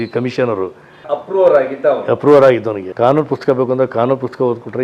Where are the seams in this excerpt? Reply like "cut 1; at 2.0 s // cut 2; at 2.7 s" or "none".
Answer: cut 1; at 1.0 s // cut 2; at 2.8 s